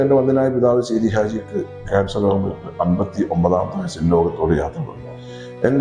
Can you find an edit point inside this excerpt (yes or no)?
no